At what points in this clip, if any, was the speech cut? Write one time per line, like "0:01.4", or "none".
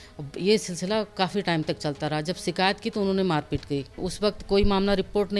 0:04.1